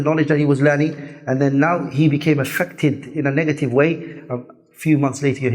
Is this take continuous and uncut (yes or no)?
yes